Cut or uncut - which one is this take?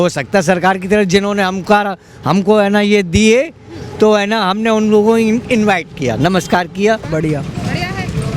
cut